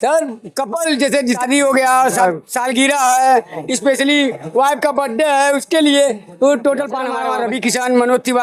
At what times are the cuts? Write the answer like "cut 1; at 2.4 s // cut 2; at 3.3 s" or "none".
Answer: cut 1; at 1.4 s // cut 2; at 2.2 s // cut 3; at 7.1 s